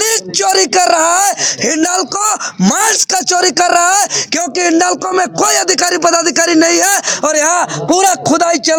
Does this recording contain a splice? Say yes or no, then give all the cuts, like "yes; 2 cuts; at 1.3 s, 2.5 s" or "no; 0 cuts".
no; 0 cuts